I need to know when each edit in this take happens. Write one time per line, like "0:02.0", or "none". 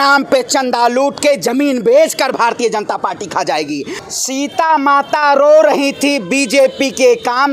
0:04.0